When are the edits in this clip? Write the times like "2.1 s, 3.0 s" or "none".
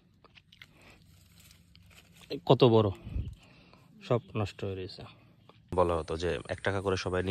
5.7 s